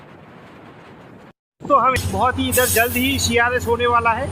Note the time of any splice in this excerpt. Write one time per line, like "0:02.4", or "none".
0:02.0